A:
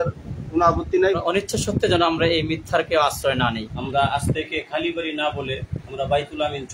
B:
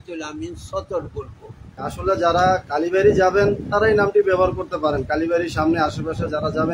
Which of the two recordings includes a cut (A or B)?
A